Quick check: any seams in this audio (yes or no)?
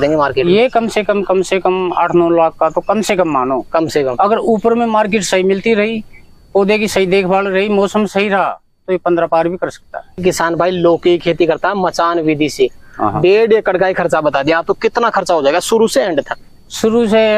yes